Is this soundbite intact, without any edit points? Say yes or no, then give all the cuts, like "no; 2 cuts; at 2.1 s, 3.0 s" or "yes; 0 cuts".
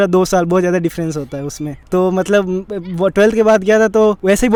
yes; 0 cuts